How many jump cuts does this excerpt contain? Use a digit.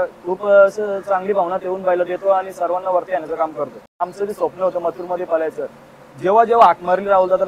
1